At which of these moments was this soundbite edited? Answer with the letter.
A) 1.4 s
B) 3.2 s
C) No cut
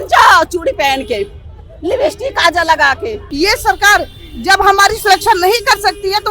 B